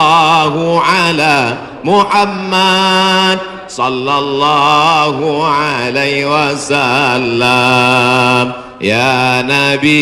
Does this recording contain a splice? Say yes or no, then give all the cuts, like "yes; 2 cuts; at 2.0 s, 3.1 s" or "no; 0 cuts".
no; 0 cuts